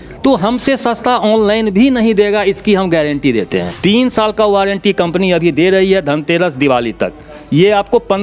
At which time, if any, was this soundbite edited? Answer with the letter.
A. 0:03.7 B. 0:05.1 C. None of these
A